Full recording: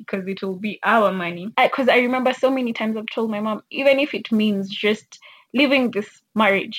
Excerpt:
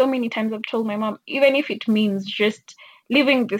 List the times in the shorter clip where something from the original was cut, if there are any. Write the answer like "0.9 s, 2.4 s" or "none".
none